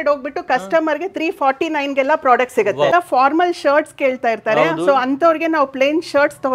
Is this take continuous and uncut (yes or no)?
no